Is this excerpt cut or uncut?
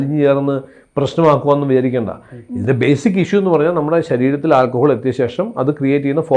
uncut